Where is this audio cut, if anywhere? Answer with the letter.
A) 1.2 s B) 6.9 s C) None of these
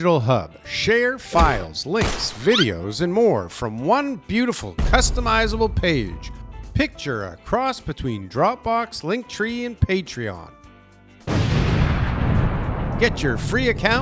C